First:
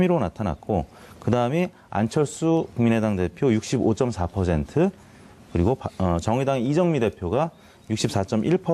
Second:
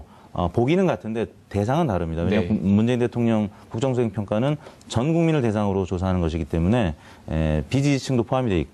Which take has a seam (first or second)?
second